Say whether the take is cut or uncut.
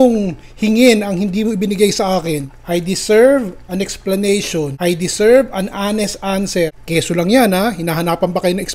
cut